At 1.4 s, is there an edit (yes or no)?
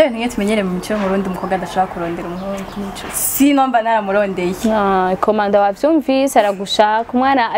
no